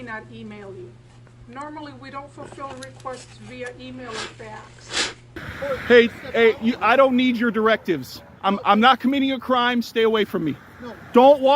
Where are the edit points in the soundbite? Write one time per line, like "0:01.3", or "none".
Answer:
0:01.3
0:05.4